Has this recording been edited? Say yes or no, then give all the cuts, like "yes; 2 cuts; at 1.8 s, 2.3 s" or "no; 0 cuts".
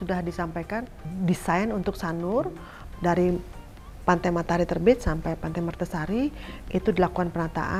no; 0 cuts